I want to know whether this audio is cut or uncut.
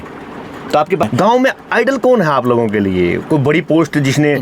cut